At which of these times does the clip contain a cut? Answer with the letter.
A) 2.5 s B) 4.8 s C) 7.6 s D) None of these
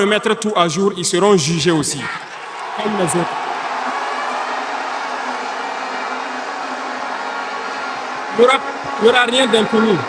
D